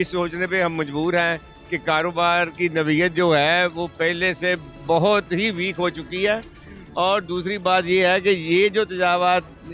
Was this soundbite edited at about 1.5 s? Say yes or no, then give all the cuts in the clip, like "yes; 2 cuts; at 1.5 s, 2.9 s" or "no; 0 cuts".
no; 0 cuts